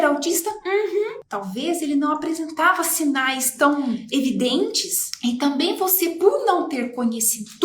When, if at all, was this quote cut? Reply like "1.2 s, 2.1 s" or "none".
1.3 s